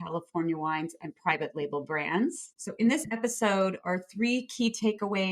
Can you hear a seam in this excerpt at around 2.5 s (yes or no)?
yes